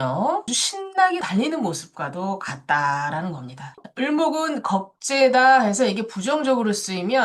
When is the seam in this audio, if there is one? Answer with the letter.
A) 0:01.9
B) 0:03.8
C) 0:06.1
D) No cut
B